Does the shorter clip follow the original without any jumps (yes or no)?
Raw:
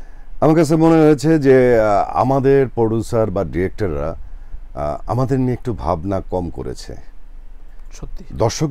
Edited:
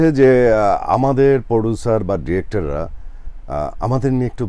yes